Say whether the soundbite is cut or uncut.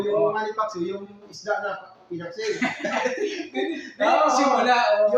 uncut